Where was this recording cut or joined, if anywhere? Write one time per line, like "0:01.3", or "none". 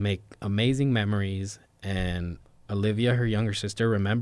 0:02.4